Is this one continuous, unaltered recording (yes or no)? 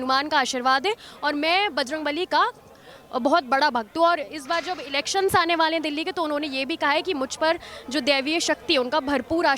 yes